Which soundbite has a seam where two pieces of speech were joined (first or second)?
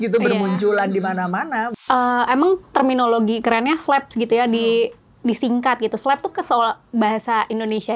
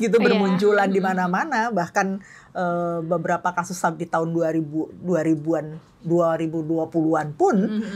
first